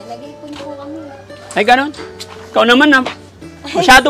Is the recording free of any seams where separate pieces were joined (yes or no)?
yes